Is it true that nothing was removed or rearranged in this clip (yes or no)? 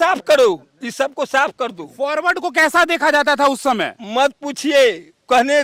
yes